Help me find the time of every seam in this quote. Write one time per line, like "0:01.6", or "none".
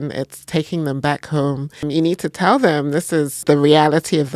0:01.8
0:03.4